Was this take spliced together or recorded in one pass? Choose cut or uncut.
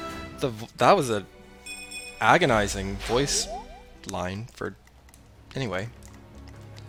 uncut